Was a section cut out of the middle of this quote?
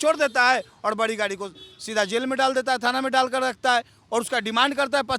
no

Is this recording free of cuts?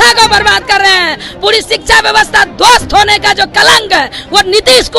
yes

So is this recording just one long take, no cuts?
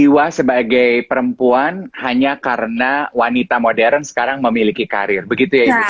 yes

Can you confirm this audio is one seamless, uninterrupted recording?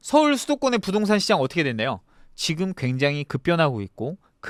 yes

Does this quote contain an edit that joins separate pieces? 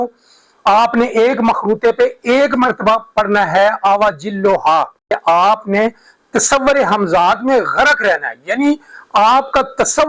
yes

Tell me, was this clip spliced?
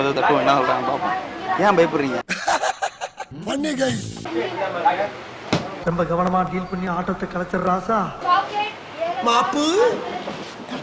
no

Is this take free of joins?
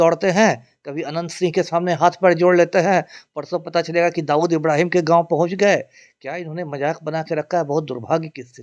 yes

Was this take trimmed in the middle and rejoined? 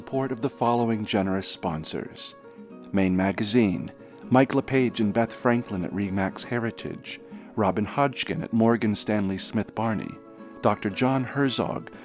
no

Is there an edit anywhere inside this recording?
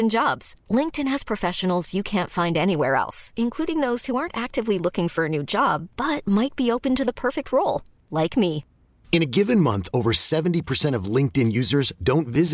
no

